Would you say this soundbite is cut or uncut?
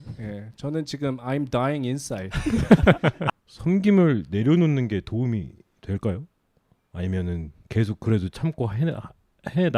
cut